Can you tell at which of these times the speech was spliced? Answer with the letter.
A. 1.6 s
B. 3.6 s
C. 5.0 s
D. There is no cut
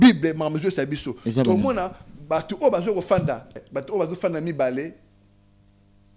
B